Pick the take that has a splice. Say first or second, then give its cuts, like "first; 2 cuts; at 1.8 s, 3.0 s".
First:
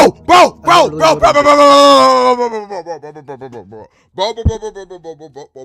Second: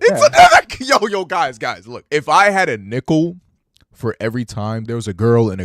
second; 2 cuts; at 1.9 s, 4.8 s